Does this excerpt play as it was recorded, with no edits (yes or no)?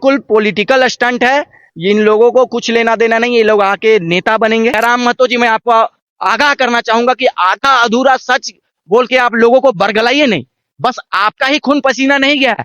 no